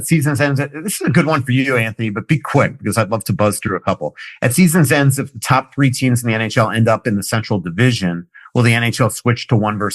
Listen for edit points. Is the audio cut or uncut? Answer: uncut